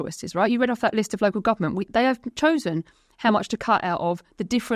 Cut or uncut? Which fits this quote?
uncut